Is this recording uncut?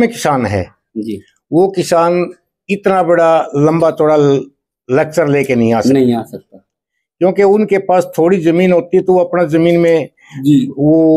yes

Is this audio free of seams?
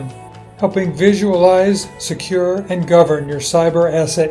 yes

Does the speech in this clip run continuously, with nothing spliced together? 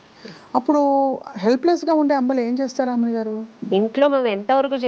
no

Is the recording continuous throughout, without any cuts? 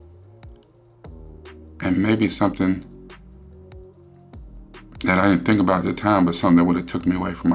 no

